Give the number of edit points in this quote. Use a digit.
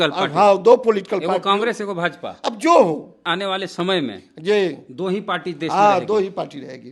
1